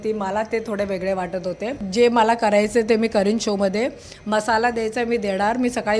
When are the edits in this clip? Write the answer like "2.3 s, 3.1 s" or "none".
1.8 s